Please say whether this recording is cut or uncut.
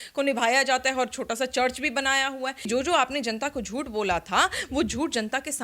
cut